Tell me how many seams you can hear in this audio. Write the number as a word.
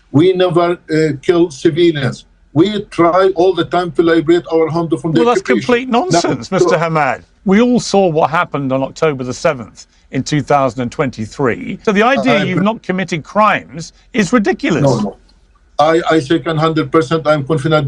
two